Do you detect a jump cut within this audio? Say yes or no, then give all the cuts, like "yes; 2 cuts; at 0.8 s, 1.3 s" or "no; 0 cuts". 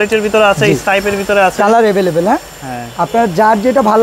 no; 0 cuts